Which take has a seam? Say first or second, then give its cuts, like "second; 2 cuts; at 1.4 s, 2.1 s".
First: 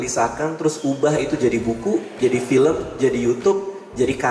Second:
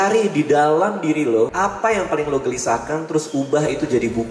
second; 1 cut; at 1.5 s